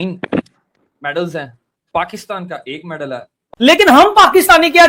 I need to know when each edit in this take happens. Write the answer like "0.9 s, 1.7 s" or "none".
3.5 s